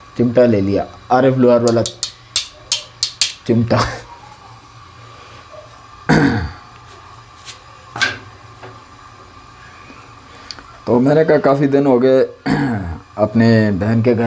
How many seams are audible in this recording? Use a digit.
0